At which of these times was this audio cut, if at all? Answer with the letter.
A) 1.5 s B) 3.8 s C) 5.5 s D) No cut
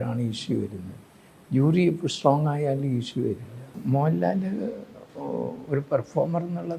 B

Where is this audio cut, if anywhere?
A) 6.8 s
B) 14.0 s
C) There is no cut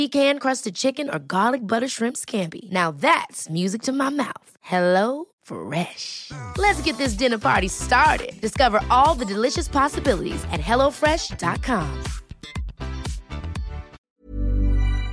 B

